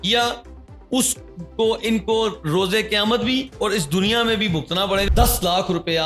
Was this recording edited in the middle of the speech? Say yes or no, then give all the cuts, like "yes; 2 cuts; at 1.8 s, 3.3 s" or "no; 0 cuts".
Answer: yes; 1 cut; at 5.1 s